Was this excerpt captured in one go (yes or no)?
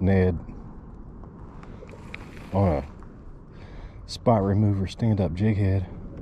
yes